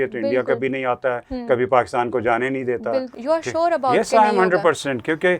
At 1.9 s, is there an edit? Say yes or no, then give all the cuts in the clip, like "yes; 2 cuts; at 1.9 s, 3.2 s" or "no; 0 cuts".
no; 1 cut; at 3.1 s